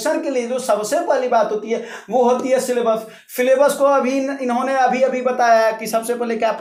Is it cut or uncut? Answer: uncut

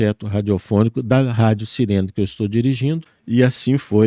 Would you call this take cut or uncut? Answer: cut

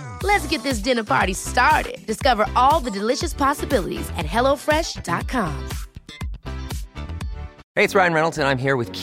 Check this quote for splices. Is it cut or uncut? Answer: uncut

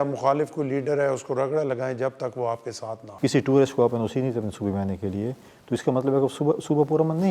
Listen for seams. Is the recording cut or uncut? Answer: cut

